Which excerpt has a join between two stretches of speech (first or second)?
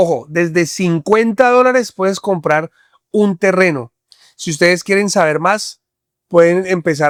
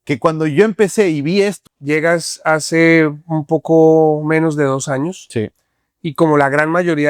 second